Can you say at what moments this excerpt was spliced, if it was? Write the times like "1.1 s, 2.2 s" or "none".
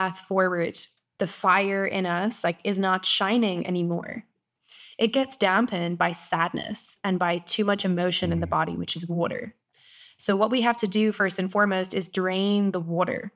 4.5 s